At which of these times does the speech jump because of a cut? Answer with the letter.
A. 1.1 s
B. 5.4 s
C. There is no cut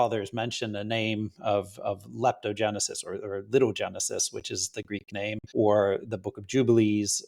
B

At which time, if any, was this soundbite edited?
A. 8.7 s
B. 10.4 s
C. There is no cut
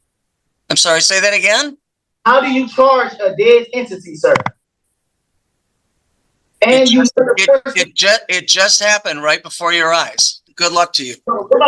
B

